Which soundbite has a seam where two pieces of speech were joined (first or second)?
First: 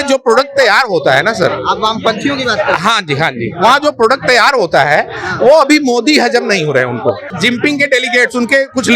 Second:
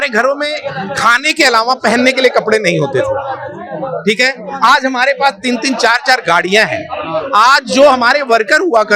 first